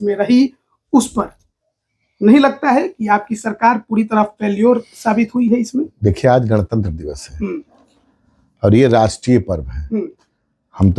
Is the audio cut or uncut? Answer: uncut